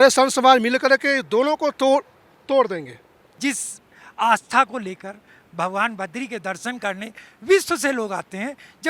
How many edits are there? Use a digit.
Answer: 1